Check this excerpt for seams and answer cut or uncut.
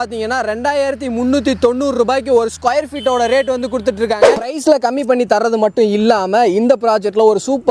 cut